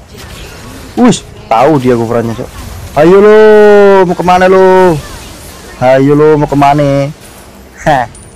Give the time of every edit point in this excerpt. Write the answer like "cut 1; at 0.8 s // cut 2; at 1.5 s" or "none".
none